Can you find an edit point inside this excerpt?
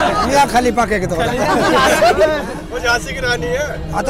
yes; 1 cut; at 2.6 s

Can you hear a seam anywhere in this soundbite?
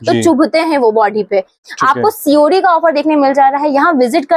yes; 1 cut; at 1.6 s

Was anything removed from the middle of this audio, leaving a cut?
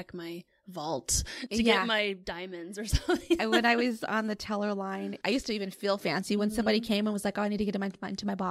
yes; 1 cut; at 5.2 s

